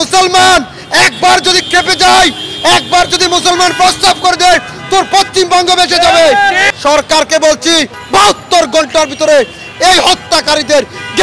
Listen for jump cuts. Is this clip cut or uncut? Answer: cut